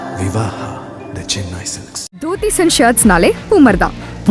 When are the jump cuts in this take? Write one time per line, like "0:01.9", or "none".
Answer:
0:02.3